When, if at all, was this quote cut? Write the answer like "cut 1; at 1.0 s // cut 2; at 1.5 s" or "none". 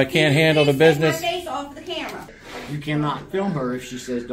cut 1; at 2.2 s